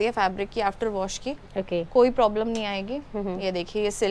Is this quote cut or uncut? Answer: uncut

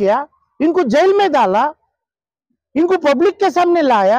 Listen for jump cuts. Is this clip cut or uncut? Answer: uncut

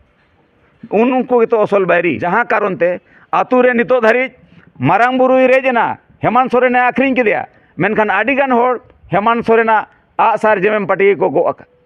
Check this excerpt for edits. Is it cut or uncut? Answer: cut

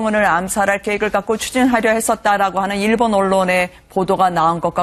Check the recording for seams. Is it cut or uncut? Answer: cut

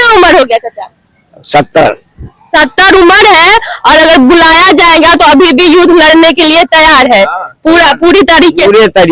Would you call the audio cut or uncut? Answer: uncut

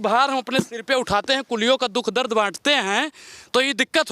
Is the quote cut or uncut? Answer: uncut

